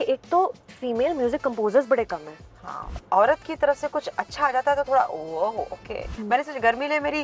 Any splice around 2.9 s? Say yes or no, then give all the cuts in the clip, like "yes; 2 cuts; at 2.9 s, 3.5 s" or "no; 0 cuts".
yes; 2 cuts; at 2.9 s, 6.1 s